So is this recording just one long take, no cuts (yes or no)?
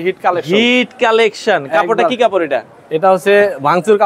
yes